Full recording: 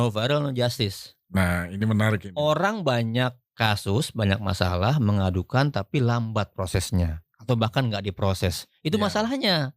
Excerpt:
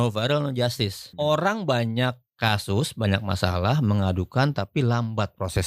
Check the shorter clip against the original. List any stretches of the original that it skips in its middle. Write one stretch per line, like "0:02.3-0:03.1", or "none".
0:01.1-0:02.3